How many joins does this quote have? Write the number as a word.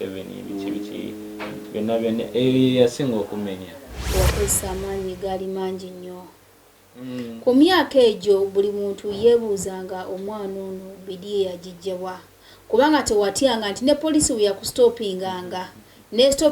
one